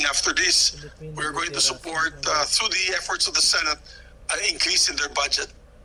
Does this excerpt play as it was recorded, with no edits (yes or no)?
yes